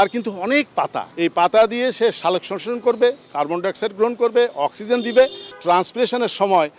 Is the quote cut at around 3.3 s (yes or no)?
no